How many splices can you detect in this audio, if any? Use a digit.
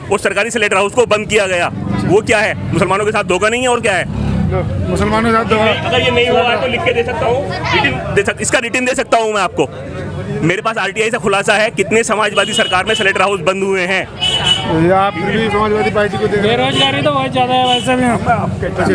0